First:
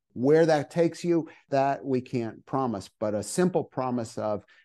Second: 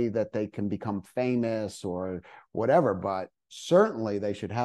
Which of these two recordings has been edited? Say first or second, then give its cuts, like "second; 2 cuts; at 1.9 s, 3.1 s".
first; 1 cut; at 1.5 s